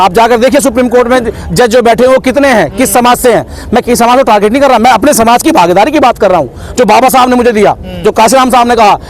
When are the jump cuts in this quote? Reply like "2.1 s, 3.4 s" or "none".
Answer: none